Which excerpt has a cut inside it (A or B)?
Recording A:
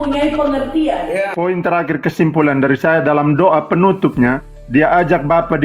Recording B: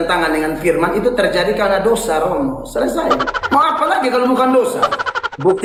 A